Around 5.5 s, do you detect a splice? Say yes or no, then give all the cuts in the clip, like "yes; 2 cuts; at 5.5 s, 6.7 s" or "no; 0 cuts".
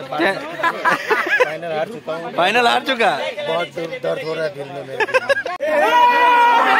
yes; 1 cut; at 5.5 s